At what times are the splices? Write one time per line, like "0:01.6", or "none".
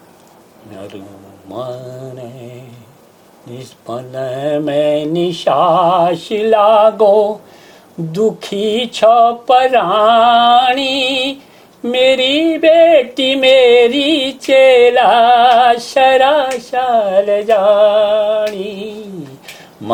none